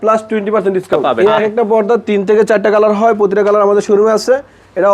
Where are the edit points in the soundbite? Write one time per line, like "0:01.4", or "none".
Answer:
0:01.0